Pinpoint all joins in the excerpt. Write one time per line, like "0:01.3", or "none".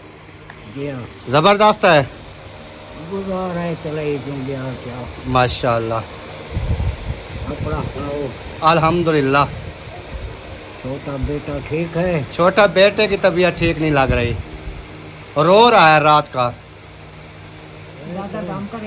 none